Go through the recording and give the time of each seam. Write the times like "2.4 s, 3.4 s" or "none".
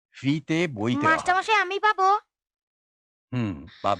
none